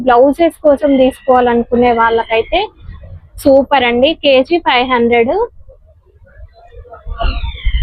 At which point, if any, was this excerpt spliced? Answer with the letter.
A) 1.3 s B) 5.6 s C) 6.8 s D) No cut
D